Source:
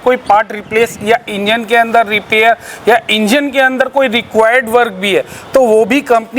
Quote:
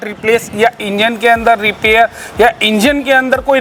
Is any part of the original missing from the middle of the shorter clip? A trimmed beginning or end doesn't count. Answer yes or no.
no